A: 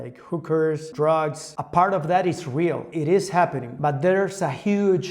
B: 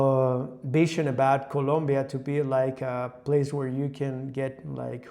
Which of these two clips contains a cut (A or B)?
A